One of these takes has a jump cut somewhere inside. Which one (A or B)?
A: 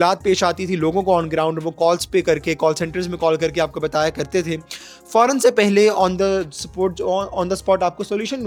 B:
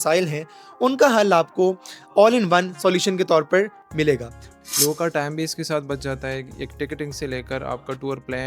B